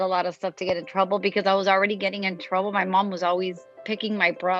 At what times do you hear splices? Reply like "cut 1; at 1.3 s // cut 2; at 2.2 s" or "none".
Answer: cut 1; at 3.7 s